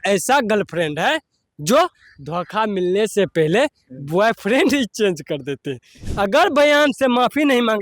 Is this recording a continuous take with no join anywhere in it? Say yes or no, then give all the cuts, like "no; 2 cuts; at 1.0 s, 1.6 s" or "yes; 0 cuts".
no; 1 cut; at 6.0 s